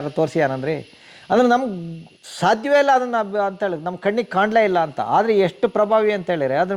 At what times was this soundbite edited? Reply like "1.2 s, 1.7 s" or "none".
none